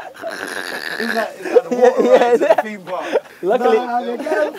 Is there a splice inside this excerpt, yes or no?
yes